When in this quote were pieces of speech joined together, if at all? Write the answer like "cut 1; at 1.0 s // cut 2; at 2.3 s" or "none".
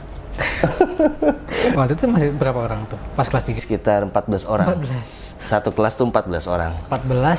cut 1; at 1.7 s // cut 2; at 3.6 s